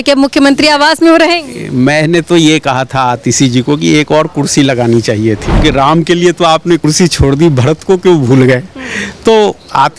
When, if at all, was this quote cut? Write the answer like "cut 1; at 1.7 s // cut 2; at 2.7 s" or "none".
cut 1; at 5.6 s